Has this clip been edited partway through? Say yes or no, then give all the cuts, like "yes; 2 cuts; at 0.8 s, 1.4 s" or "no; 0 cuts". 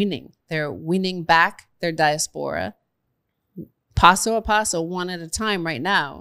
no; 0 cuts